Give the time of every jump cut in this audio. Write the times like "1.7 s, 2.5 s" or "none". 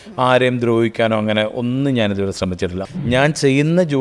2.8 s

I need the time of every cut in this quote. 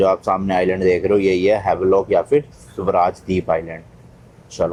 none

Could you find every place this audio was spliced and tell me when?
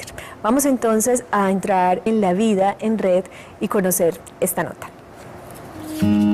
4.5 s

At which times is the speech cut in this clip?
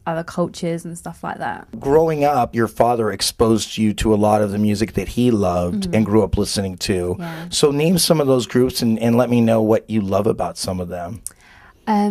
9.6 s

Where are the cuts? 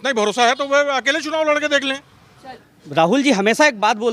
2.6 s

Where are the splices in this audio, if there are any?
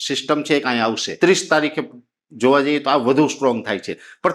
1.1 s

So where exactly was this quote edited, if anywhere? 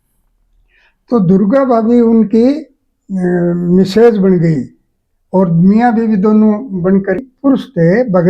7.2 s

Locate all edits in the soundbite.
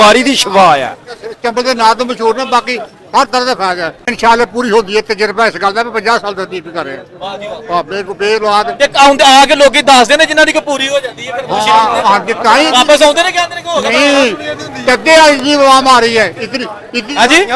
none

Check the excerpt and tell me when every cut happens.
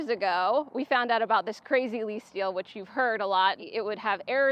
3.6 s

